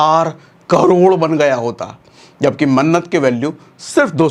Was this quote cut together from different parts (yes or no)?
no